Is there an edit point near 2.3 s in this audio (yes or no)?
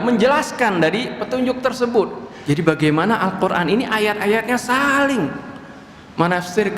yes